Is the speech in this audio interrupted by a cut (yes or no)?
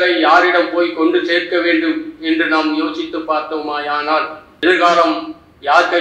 yes